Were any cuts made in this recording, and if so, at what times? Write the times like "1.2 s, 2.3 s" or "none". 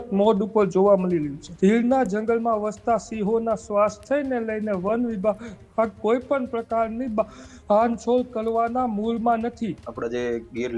1.4 s, 9.9 s

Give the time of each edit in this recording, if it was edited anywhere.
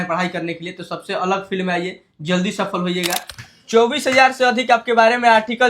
3.3 s

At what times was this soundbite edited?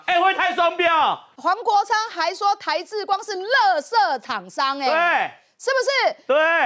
1.3 s

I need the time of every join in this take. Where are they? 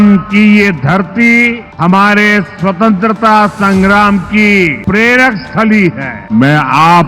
1.7 s, 4.8 s, 6.1 s

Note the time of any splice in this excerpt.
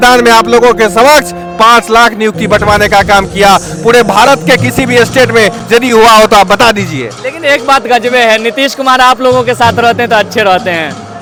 none

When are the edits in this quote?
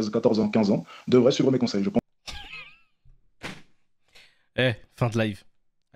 none

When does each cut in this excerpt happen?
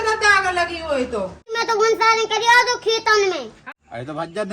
1.6 s, 3.5 s

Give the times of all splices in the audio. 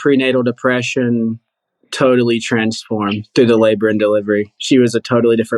4.5 s

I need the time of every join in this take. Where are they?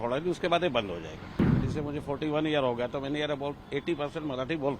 1.6 s

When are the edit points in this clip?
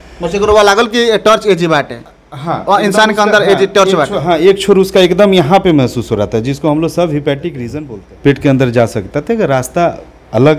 7.6 s

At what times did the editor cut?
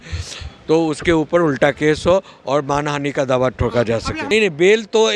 4.2 s

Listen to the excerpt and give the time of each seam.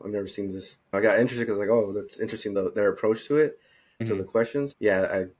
0.9 s, 2.5 s, 4.2 s

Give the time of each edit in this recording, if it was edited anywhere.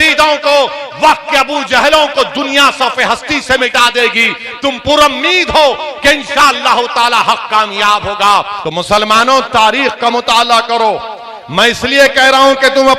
8.6 s

